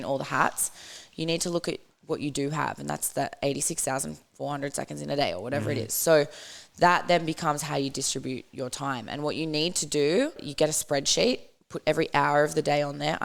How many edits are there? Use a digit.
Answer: 1